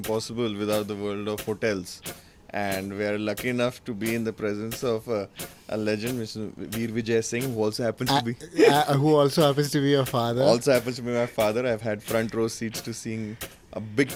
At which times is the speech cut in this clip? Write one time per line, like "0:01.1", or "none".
none